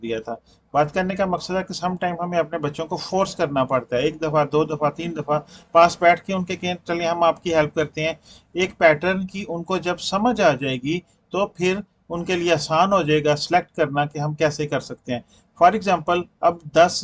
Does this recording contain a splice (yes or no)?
no